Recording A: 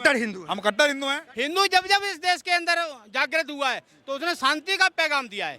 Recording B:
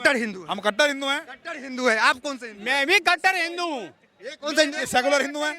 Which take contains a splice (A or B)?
A